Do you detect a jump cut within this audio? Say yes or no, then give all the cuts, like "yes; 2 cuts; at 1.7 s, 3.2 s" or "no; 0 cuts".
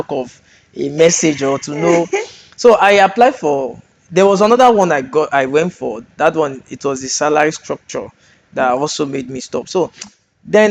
no; 0 cuts